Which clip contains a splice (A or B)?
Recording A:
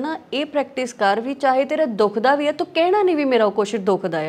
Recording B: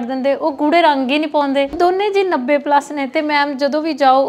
B